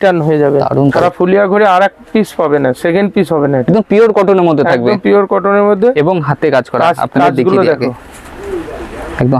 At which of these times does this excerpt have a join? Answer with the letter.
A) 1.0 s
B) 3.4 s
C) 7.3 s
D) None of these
A